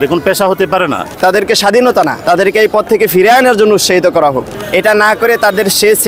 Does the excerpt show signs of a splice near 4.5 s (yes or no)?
yes